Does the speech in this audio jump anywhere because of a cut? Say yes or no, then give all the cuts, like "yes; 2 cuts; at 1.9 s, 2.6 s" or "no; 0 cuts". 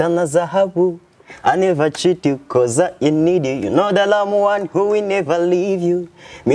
no; 0 cuts